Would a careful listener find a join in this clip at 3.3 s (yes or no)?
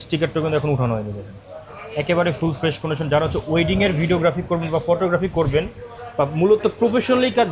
no